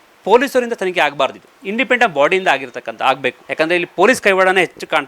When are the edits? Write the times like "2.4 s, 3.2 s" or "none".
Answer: 3.4 s